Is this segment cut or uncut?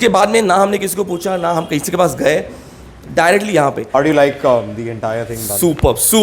cut